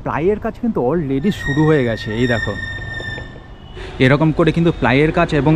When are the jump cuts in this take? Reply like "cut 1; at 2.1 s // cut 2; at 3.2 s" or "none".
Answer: none